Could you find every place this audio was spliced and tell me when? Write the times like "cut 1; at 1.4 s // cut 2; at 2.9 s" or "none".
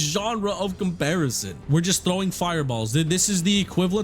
cut 1; at 1.6 s